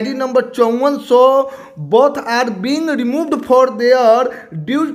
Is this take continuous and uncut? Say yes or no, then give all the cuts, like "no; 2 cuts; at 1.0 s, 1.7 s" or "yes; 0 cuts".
yes; 0 cuts